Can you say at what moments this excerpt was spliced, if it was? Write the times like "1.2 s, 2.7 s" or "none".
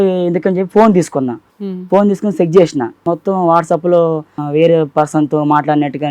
1.4 s, 3.0 s, 4.4 s